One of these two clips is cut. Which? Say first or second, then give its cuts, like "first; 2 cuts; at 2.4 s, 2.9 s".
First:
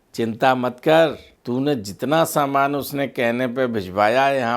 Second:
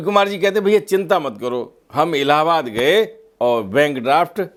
first; 1 cut; at 1.3 s